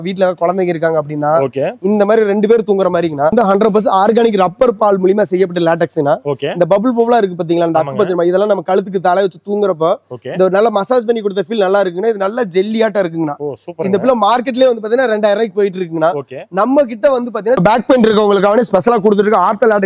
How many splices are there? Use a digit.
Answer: 2